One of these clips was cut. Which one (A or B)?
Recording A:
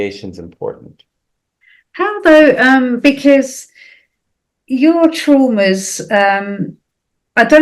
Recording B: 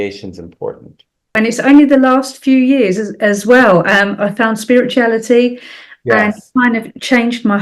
B